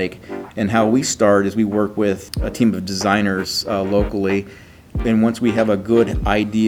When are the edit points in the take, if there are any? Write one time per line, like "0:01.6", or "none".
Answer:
0:02.3
0:05.0